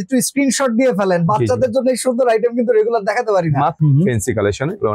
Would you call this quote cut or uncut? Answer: cut